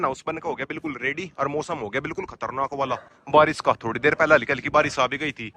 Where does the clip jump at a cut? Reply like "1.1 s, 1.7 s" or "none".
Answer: none